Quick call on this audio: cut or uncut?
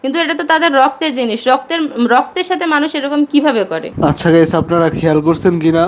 uncut